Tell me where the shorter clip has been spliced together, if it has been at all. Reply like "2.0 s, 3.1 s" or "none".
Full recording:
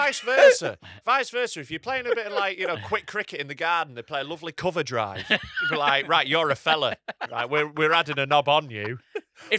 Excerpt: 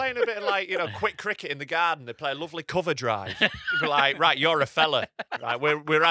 none